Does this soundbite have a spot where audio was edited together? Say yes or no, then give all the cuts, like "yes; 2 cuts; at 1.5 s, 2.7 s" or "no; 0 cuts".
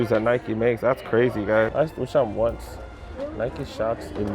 yes; 1 cut; at 1.7 s